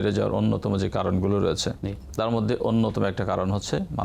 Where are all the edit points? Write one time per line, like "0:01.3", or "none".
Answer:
0:01.7